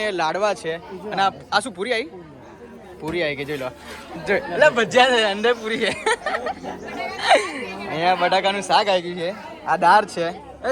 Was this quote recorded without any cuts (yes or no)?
yes